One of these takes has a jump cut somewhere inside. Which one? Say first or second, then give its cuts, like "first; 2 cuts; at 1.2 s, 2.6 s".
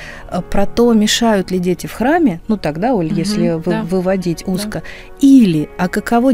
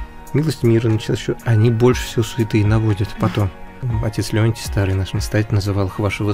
second; 1 cut; at 3.8 s